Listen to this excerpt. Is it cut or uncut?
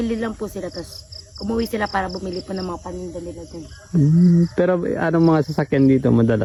uncut